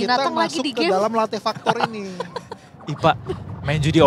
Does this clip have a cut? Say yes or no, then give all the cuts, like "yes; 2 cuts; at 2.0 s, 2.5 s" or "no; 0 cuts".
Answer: no; 0 cuts